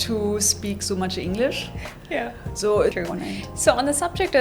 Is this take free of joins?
no; 1 cut; at 2.9 s

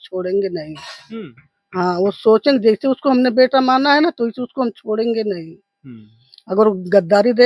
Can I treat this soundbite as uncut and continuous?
yes; 0 cuts

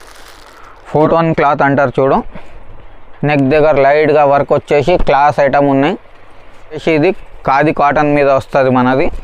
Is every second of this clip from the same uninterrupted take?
no; 2 cuts; at 0.9 s, 6.8 s

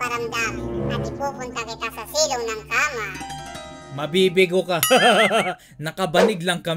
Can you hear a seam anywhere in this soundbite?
yes; 1 cut; at 1.0 s

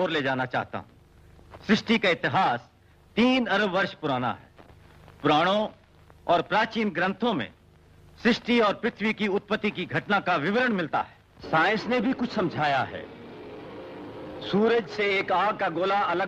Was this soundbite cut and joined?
no; 0 cuts

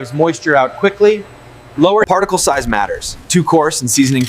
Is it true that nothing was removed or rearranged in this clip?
no; 1 cut; at 2.1 s

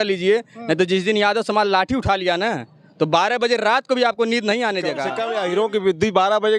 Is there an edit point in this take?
yes; 1 cut; at 5.1 s

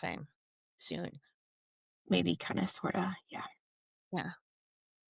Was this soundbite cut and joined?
no; 0 cuts

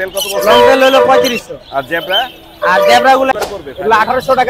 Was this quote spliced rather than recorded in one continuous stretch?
yes; 1 cut; at 3.3 s

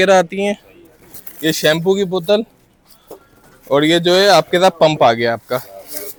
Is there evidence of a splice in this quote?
no; 0 cuts

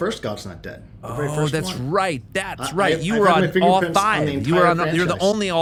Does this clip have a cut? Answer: no; 0 cuts

